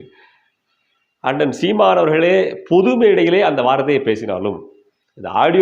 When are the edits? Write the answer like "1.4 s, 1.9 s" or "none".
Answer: none